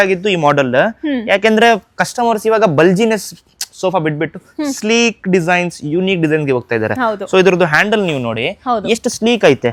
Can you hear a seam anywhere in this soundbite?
no; 0 cuts

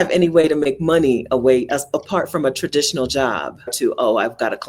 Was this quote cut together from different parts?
yes; 1 cut; at 3.7 s

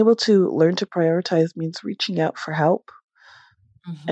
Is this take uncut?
yes; 0 cuts

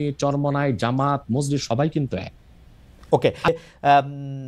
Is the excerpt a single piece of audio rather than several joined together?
no; 1 cut; at 3.5 s

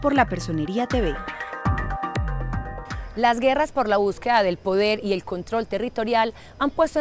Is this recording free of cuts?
no; 1 cut; at 5.3 s

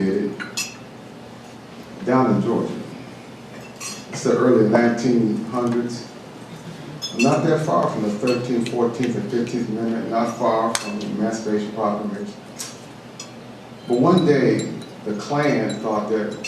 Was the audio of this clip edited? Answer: yes; 1 cut; at 12.3 s

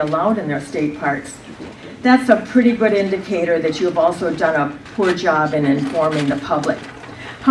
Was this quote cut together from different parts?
yes; 1 cut; at 3.6 s

